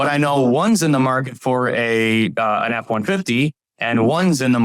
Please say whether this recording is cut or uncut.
uncut